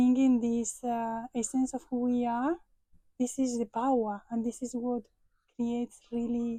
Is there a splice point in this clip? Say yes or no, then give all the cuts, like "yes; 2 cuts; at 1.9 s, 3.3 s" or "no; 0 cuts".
no; 0 cuts